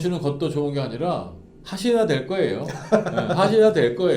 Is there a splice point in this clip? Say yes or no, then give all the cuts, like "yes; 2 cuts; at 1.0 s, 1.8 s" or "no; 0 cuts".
no; 0 cuts